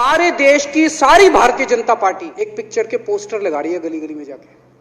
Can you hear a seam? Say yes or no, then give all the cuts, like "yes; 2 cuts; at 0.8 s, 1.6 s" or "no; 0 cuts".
yes; 1 cut; at 2.3 s